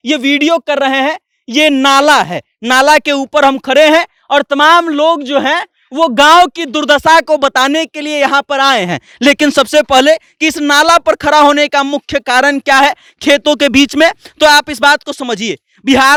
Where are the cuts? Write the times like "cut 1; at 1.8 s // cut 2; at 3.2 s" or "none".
none